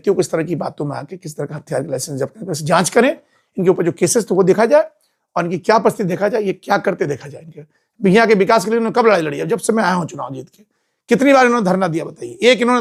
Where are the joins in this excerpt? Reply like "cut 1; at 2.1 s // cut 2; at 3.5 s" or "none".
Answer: none